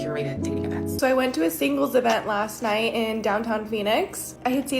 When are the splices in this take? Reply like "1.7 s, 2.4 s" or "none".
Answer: 0.9 s